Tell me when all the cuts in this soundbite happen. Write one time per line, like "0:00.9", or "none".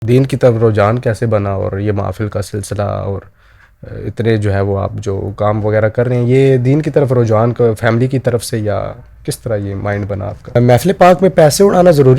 0:10.6

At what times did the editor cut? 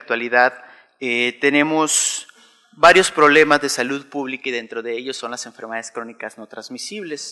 0:06.3

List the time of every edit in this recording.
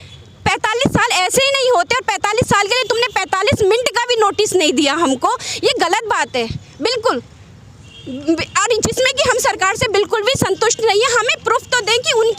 none

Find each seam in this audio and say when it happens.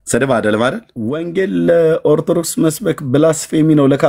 0:01.2

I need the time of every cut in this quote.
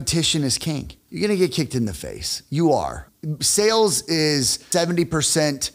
0:01.0
0:03.0
0:04.6

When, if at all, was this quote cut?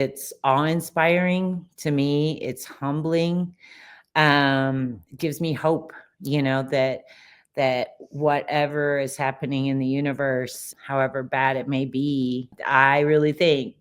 0:10.7
0:12.5

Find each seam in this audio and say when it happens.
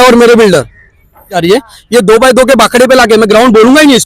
0:01.4

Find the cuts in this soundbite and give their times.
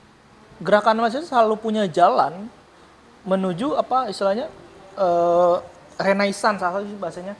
none

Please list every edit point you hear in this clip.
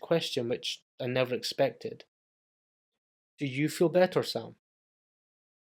none

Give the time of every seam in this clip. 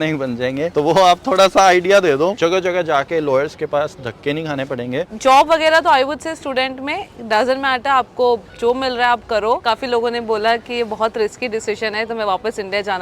0:02.3
0:05.1
0:09.6

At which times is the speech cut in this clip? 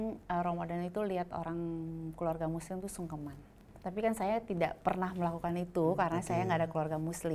0:03.7

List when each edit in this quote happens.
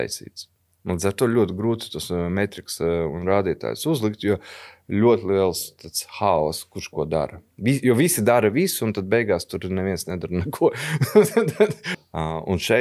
0:11.9

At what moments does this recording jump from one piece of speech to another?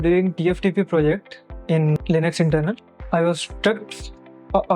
none

